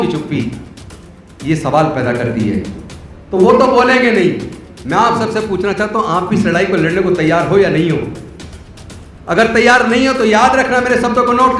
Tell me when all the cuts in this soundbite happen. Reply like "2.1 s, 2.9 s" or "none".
none